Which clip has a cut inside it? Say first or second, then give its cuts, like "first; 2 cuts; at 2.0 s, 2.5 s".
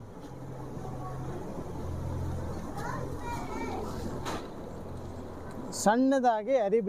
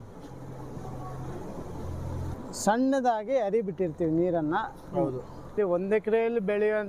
second; 2 cuts; at 2.3 s, 5.5 s